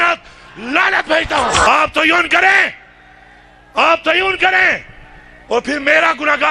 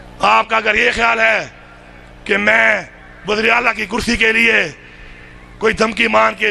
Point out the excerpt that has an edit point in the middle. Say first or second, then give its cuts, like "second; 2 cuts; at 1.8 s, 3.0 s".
first; 1 cut; at 1.7 s